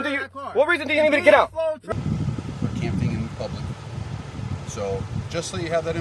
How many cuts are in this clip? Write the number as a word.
one